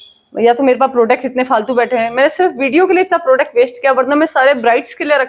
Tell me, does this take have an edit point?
no; 0 cuts

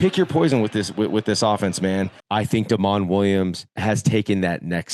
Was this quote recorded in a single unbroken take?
no; 1 cut; at 2.2 s

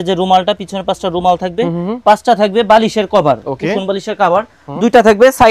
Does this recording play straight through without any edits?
yes; 0 cuts

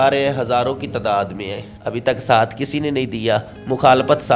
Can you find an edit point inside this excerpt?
yes; 1 cut; at 1.7 s

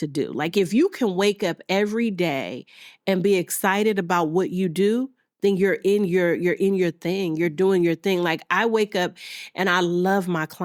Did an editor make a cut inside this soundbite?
no; 0 cuts

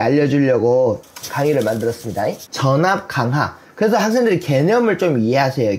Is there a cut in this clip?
yes; 2 cuts; at 1.1 s, 2.5 s

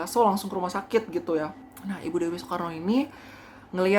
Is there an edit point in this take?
yes; 1 cut; at 1.7 s

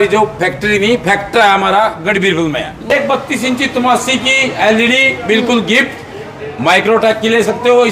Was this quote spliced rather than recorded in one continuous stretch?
yes; 1 cut; at 2.9 s

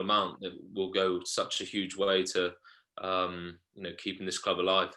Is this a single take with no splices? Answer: yes; 0 cuts

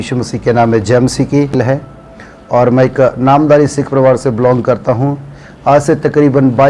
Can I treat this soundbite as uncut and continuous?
no; 1 cut; at 1.5 s

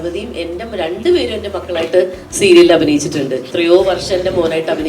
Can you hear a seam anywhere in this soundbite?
yes; 1 cut; at 3.4 s

